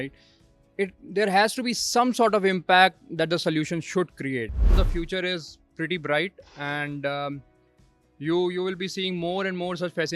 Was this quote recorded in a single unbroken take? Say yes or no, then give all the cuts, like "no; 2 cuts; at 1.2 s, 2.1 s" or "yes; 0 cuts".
no; 1 cut; at 4.7 s